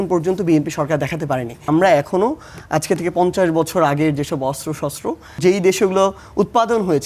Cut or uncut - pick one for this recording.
cut